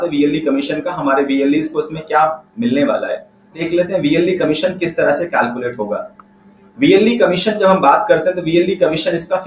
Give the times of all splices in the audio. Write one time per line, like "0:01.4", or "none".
0:03.6